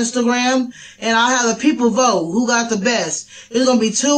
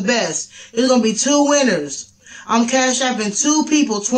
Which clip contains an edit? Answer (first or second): second